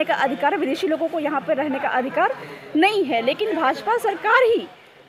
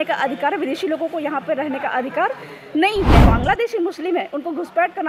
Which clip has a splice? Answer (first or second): second